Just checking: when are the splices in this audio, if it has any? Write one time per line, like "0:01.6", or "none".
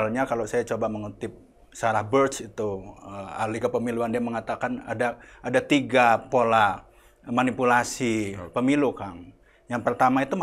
none